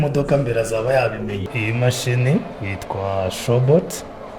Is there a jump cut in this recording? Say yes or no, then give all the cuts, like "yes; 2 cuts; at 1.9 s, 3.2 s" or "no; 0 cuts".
yes; 1 cut; at 1.5 s